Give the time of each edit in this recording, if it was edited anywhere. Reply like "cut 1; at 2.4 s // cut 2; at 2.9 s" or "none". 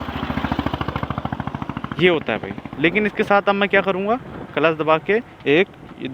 cut 1; at 2.6 s